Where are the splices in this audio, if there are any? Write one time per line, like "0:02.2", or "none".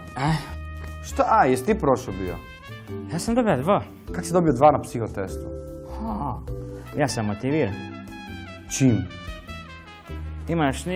0:01.1